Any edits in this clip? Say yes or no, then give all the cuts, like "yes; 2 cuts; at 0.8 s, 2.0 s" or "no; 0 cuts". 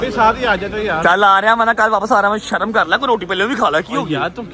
no; 0 cuts